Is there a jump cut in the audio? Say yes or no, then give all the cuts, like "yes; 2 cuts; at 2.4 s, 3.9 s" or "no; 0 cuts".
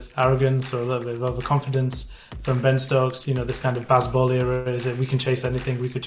no; 0 cuts